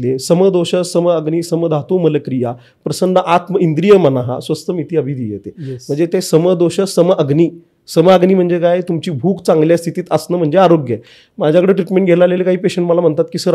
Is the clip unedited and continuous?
yes; 0 cuts

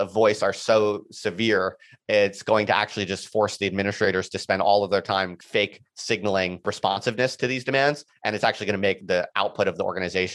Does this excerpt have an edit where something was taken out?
yes; 3 cuts; at 5.3 s, 6.6 s, 9.0 s

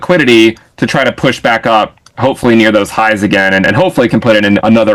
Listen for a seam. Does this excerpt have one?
no; 0 cuts

